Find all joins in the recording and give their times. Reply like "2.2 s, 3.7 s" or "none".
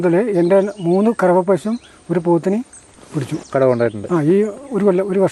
3.4 s